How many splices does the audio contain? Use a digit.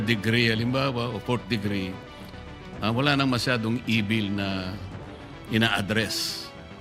0